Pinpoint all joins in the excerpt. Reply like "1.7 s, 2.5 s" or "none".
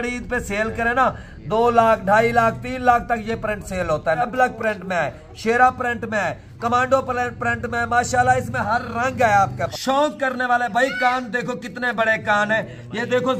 4.3 s, 9.6 s

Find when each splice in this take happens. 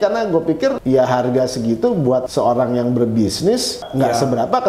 0.8 s, 2.3 s, 3.8 s

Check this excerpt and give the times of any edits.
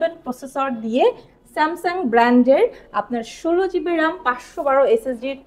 none

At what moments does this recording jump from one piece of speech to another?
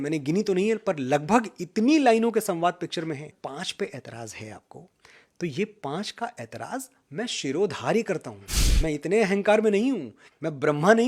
3.3 s

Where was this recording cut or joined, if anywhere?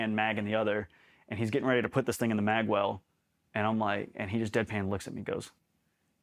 none

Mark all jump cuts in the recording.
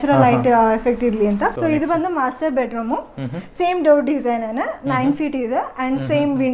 1.6 s

